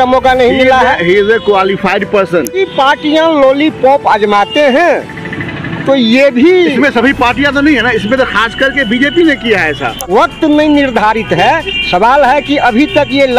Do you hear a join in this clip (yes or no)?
yes